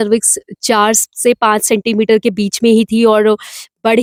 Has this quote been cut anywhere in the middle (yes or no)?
no